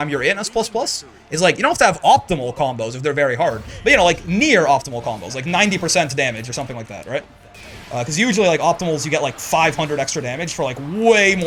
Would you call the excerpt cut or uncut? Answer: uncut